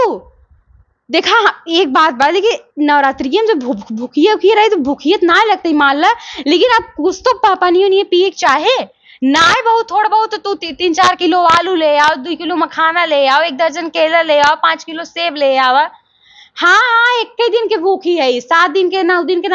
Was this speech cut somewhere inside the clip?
no; 0 cuts

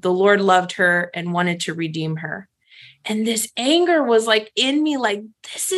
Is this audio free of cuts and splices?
yes; 0 cuts

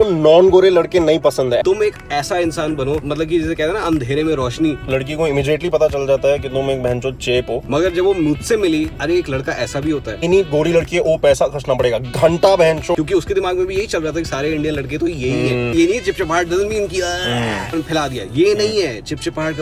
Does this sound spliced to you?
yes; 9 cuts; at 1.6 s, 3.0 s, 4.8 s, 7.6 s, 9.0 s, 10.2 s, 12.9 s, 15.7 s, 17.7 s

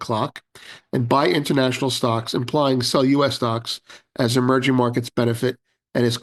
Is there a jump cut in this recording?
no; 0 cuts

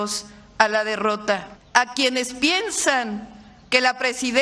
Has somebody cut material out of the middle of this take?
yes; 1 cut; at 1.5 s

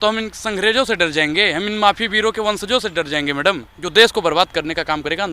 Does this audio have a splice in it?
yes; 1 cut; at 3.7 s

